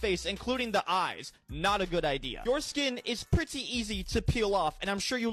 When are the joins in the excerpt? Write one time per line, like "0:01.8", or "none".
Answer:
none

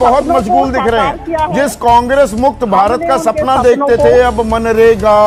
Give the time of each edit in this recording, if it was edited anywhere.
none

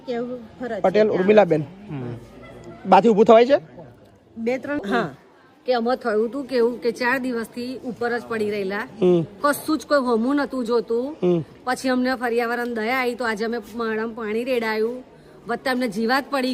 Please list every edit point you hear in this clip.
0:04.8

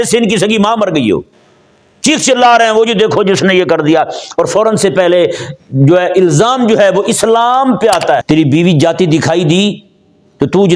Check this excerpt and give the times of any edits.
0:08.2

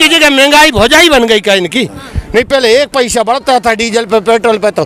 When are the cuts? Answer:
none

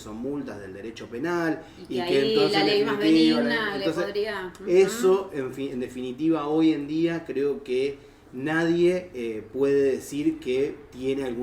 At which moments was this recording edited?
none

